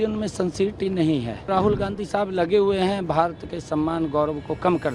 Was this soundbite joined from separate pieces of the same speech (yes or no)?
yes